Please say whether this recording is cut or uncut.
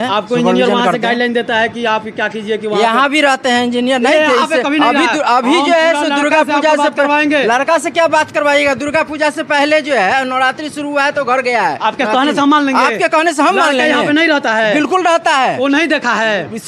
uncut